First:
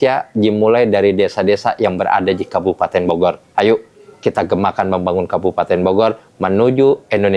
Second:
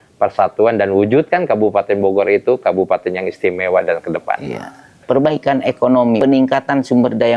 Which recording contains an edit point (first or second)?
second